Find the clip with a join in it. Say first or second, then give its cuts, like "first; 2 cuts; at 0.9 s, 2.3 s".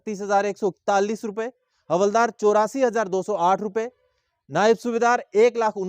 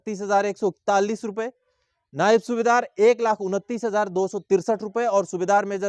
second; 1 cut; at 1.7 s